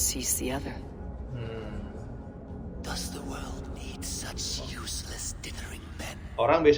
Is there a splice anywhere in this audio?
no; 0 cuts

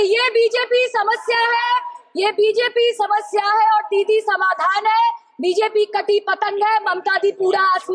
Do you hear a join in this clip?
no; 0 cuts

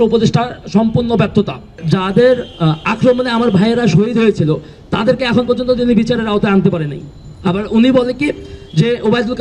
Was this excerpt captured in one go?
no; 1 cut; at 1.8 s

